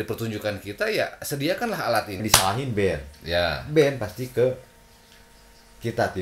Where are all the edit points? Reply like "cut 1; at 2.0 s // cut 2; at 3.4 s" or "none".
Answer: cut 1; at 2.2 s